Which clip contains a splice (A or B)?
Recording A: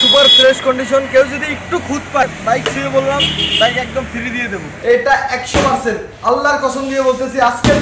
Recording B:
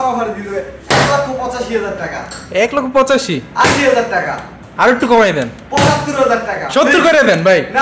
A